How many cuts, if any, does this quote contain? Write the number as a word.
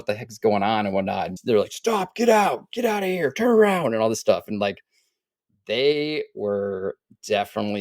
one